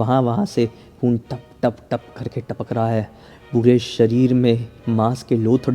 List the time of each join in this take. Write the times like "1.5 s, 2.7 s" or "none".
4.7 s